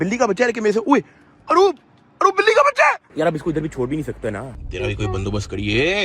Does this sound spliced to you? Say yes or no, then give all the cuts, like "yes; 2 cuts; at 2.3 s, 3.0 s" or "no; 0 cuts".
yes; 2 cuts; at 3.1 s, 4.4 s